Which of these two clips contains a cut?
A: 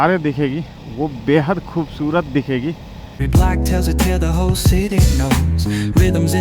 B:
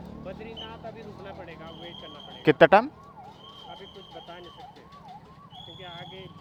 A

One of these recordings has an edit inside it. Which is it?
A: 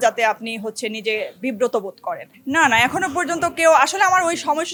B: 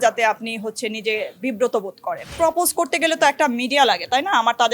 B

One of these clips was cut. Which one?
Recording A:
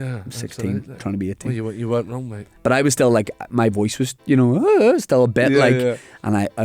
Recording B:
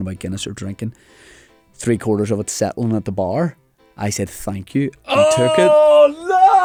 A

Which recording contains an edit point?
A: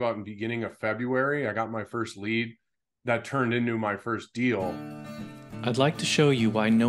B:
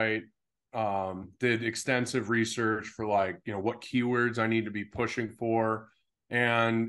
A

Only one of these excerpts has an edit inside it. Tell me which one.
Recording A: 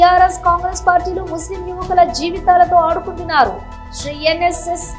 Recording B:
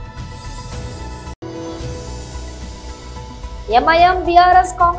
B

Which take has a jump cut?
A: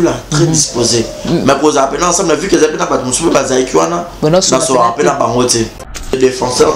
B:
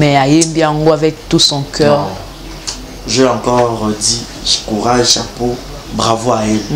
A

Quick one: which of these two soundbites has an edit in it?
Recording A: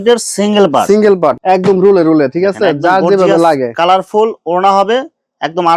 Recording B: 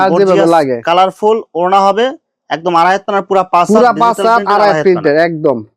A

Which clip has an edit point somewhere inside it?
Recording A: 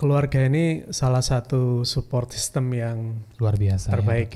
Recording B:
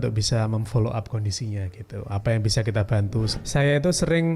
B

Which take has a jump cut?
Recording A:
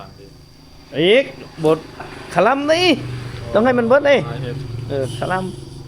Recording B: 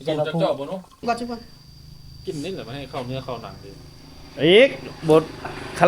B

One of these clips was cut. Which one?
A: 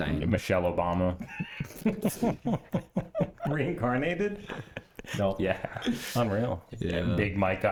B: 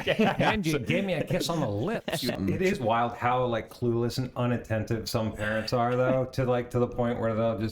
B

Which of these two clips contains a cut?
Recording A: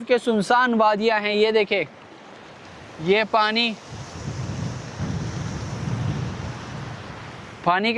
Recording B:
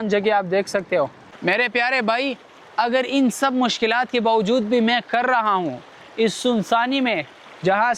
B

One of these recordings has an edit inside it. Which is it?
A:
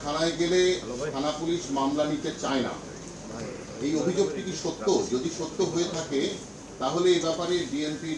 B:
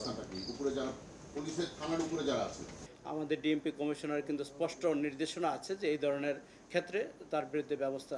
B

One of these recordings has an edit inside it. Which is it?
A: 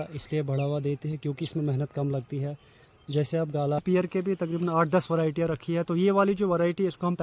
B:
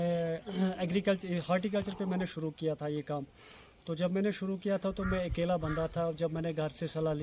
A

